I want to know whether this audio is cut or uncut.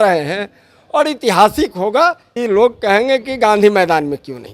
cut